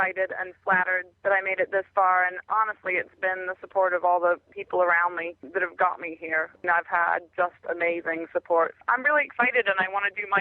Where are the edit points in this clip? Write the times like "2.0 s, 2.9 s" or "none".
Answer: 1.0 s, 4.5 s, 5.4 s, 6.6 s, 8.7 s